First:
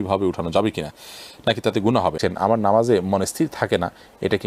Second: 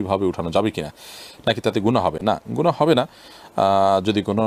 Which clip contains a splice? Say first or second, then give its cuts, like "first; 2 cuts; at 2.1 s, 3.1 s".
first; 1 cut; at 2.2 s